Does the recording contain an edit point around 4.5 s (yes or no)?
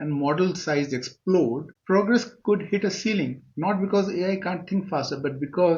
no